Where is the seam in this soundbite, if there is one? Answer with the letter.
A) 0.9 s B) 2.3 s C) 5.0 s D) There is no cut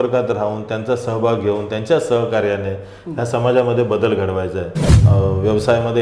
C